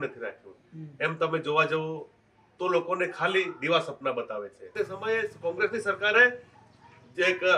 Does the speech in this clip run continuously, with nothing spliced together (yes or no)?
no